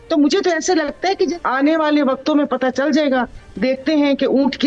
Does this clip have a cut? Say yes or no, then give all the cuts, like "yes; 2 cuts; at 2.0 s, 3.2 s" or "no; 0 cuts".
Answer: yes; 1 cut; at 1.3 s